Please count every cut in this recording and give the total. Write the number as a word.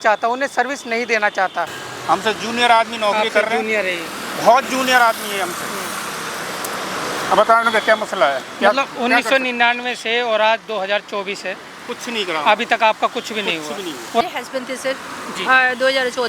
two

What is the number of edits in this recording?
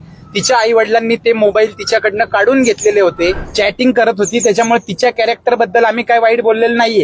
one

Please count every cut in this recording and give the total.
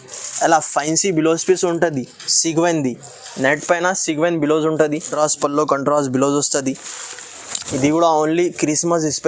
one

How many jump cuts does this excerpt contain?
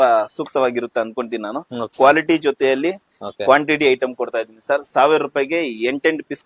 one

